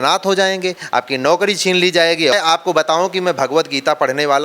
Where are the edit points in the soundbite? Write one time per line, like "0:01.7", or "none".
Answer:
0:02.3